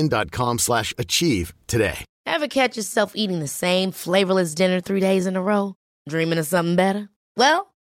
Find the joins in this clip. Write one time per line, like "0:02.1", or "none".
0:02.1